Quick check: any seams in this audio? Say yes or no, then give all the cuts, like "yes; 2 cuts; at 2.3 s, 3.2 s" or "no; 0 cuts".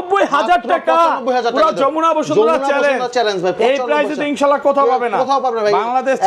no; 0 cuts